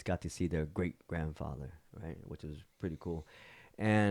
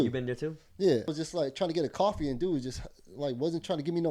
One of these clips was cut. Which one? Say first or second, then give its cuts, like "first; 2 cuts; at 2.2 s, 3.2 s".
second; 1 cut; at 1.1 s